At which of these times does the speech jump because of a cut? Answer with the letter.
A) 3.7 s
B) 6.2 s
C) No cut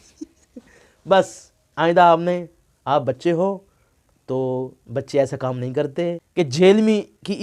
B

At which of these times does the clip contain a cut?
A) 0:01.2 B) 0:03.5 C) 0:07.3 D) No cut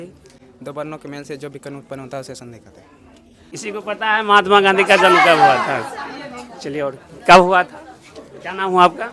B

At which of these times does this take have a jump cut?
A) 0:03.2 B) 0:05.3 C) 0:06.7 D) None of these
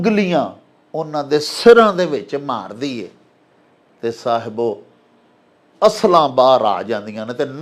D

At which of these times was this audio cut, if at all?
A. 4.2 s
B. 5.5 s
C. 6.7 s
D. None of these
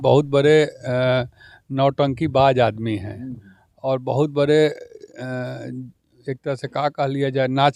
D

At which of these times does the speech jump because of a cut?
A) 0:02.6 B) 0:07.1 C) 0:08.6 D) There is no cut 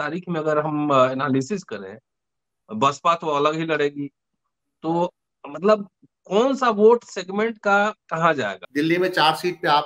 C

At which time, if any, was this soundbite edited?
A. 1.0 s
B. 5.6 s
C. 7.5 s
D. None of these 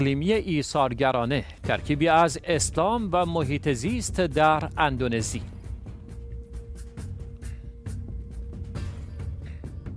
D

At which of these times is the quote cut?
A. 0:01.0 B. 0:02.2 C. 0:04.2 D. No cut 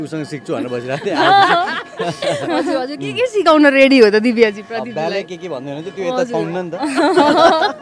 D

